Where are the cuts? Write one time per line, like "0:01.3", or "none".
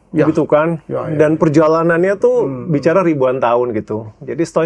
none

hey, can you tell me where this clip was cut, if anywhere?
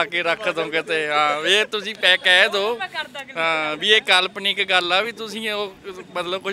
none

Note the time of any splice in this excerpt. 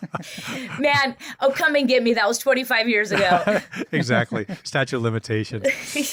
none

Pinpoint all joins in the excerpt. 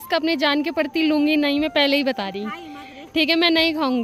none

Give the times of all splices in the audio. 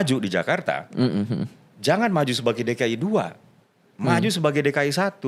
none

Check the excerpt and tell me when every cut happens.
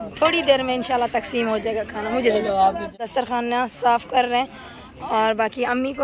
0:03.0

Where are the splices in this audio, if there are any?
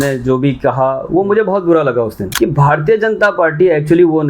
0:02.2

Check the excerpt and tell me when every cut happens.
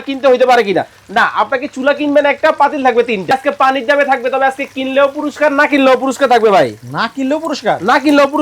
0:03.3

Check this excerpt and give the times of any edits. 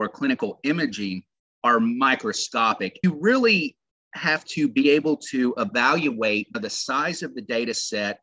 0:02.9

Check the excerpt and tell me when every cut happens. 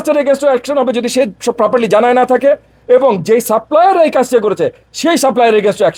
none

